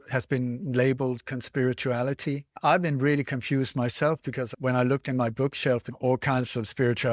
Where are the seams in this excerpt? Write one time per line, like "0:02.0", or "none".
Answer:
0:02.6
0:04.5
0:05.9